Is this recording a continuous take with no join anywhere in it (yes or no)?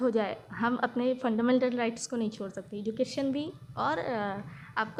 yes